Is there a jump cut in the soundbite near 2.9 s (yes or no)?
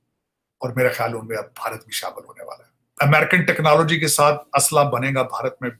yes